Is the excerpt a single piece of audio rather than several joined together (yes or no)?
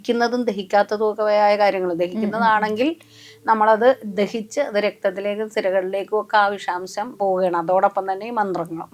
yes